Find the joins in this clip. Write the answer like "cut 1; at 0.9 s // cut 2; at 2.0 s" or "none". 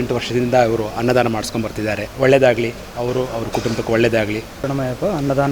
cut 1; at 4.5 s